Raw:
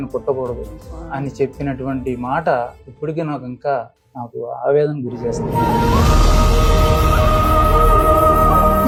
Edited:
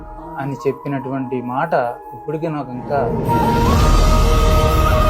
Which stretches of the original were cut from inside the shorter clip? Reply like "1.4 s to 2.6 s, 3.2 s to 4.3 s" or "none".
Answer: 3.8 s to 5.3 s